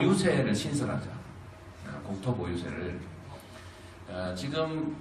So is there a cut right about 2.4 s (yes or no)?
yes